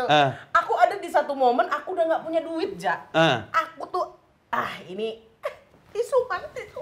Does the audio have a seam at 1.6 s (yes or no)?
no